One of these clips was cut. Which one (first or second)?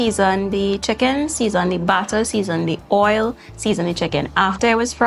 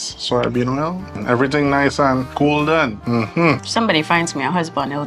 second